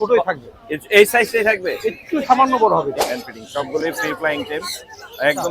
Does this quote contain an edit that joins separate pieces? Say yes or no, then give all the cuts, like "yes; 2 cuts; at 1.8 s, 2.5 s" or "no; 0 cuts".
yes; 1 cut; at 3.0 s